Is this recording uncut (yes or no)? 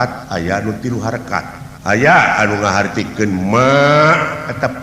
no